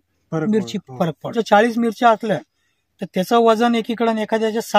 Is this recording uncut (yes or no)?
no